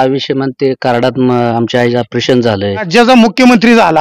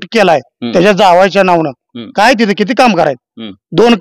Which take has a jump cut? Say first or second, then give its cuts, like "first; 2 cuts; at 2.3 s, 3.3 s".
first; 1 cut; at 2.9 s